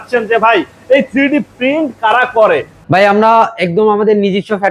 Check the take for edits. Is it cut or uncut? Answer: cut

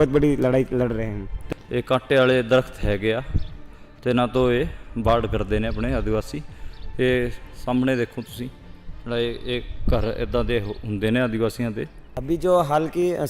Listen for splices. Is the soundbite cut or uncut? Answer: cut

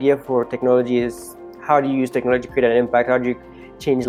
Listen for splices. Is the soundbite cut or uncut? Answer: uncut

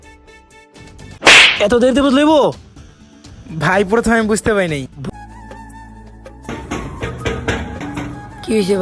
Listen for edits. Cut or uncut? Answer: cut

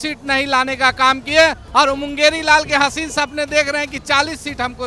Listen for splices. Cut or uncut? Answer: uncut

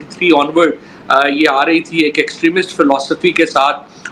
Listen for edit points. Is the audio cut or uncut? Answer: uncut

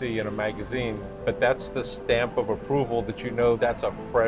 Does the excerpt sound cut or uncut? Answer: uncut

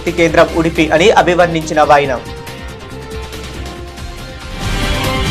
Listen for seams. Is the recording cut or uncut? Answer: cut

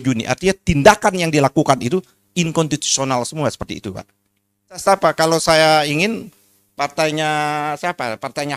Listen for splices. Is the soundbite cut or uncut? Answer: cut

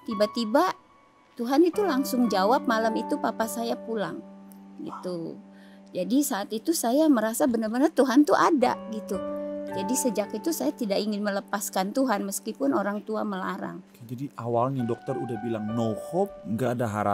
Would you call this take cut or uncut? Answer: cut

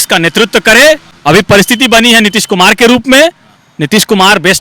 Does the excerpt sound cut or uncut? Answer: cut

